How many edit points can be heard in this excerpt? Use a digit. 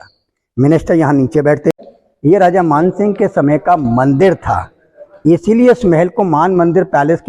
1